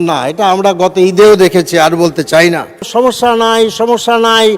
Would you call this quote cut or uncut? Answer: cut